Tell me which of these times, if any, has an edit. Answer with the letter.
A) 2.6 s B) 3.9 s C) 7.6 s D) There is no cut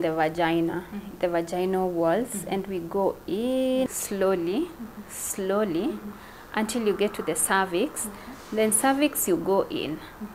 B